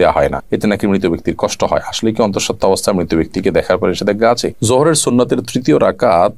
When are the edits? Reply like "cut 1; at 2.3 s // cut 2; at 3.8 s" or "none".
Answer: cut 1; at 4.5 s